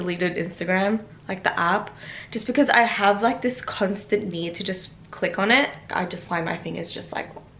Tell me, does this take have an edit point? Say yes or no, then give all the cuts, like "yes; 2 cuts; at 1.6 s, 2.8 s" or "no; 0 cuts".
no; 0 cuts